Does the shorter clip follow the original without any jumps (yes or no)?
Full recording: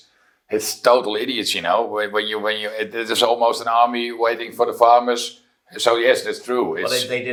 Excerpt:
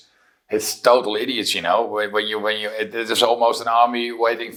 yes